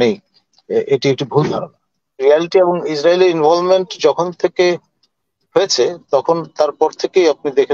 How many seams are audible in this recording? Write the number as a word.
one